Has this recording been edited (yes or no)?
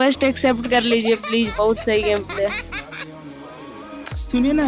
no